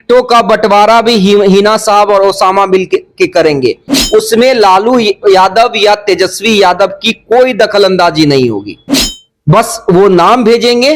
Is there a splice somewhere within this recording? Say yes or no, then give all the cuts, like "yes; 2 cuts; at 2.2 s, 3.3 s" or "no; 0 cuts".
no; 0 cuts